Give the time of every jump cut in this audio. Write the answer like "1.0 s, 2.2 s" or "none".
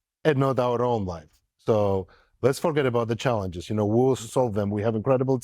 4.2 s